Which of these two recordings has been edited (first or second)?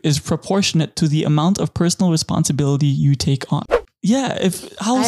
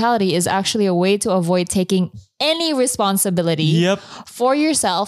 first